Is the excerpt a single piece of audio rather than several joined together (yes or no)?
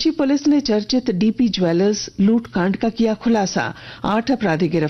yes